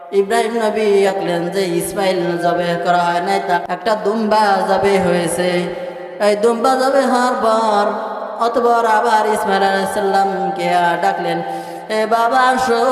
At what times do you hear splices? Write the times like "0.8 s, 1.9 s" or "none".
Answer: 1.1 s, 2.4 s